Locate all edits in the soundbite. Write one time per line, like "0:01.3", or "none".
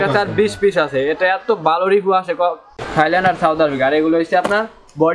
0:02.7